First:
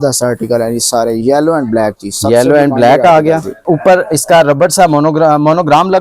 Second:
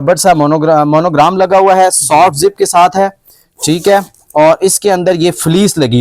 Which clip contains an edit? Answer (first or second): first